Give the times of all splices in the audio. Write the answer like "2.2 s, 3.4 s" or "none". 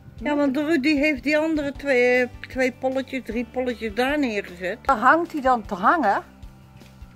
4.9 s, 6.2 s